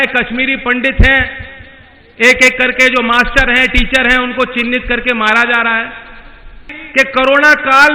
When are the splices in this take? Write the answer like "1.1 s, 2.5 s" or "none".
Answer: 6.7 s